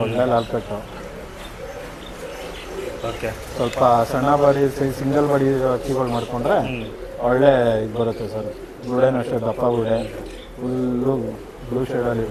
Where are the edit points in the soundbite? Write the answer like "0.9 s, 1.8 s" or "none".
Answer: none